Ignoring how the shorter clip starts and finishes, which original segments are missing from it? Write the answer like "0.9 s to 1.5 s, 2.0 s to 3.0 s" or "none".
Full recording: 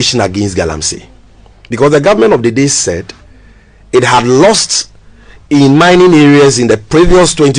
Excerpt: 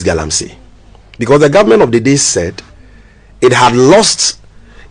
none